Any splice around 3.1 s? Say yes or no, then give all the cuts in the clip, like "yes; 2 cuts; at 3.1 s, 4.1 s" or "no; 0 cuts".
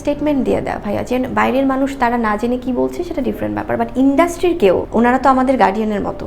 no; 1 cut; at 4.9 s